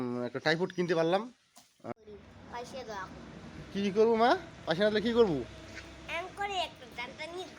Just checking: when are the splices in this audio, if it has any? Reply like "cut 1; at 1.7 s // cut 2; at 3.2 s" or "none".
cut 1; at 1.9 s